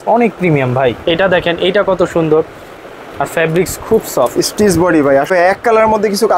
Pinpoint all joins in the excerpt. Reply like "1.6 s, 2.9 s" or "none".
1.0 s, 5.3 s